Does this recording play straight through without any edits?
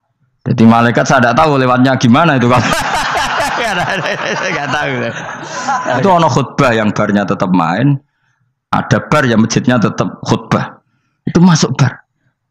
no; 1 cut; at 6.0 s

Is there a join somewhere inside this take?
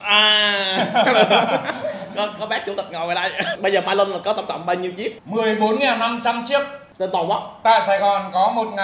yes; 3 cuts; at 3.5 s, 5.2 s, 6.8 s

